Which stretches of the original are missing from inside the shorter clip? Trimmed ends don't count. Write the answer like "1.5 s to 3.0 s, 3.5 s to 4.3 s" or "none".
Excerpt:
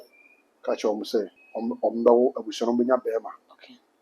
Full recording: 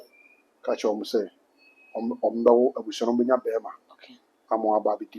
1.4 s to 1.8 s